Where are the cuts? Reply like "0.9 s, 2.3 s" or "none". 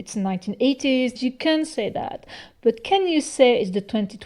1.2 s